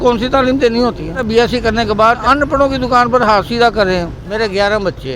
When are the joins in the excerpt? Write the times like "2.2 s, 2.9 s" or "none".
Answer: 1.2 s, 2.2 s, 4.2 s